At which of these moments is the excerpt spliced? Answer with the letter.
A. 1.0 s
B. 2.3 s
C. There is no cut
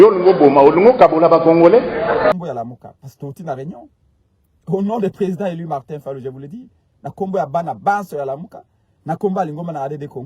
B